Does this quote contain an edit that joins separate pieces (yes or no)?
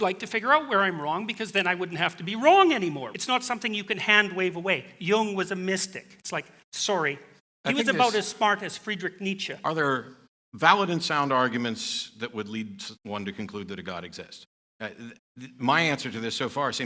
yes